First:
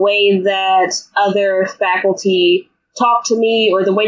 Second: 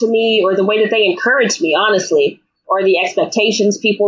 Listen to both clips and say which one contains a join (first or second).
second